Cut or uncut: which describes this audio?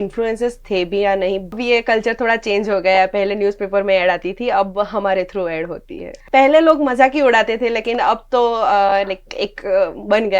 cut